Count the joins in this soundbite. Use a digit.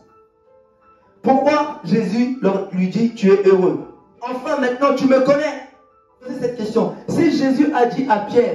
2